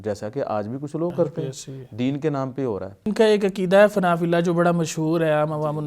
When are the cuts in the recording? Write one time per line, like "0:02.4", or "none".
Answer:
0:03.1